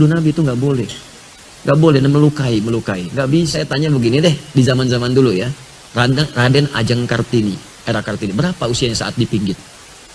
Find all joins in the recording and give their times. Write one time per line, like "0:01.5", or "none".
0:03.6